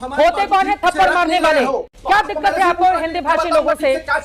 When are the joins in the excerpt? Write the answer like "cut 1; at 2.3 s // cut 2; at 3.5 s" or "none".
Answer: cut 1; at 1.9 s